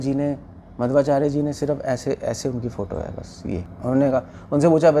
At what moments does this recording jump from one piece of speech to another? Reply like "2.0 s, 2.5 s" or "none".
3.7 s

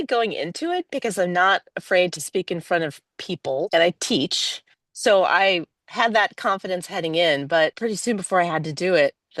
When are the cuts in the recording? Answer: 3.7 s, 7.8 s

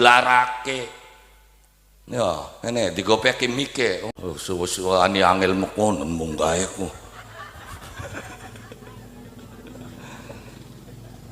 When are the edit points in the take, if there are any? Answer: 4.1 s

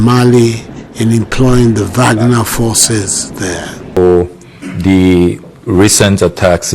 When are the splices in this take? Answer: 4.0 s

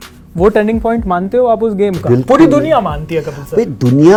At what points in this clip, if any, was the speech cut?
none

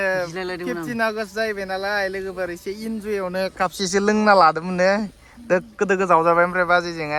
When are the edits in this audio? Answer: none

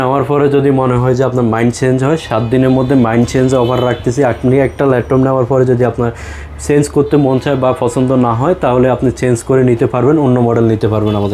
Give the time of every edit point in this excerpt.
none

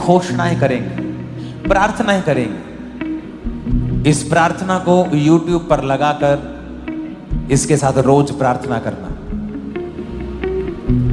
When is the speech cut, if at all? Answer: 1.5 s, 3.6 s

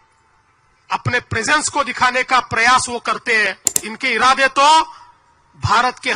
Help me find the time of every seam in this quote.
3.9 s

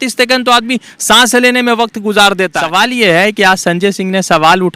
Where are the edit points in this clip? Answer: 2.6 s

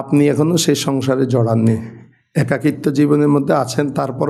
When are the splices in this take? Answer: none

